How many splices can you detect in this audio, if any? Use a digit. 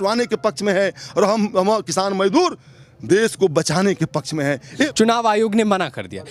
0